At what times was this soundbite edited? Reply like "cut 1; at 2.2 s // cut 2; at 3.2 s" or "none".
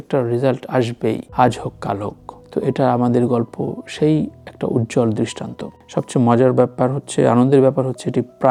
none